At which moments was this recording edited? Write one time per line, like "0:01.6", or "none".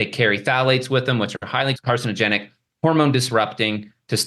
0:01.8